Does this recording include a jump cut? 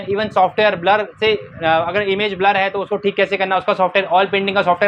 no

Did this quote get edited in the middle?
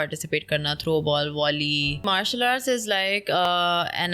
yes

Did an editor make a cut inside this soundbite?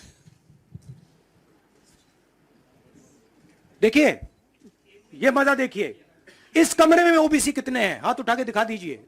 no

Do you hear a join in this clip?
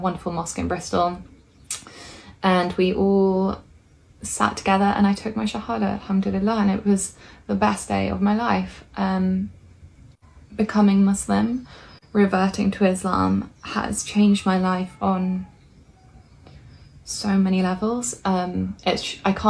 no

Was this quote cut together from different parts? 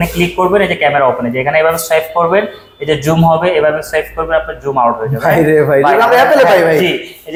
no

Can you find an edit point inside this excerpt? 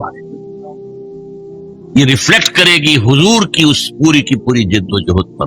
no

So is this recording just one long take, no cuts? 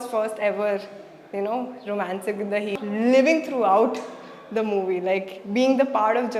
no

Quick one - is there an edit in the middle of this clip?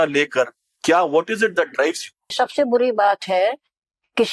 yes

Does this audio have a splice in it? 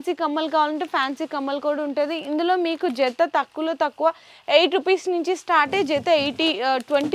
no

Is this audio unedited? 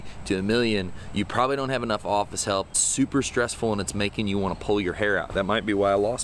no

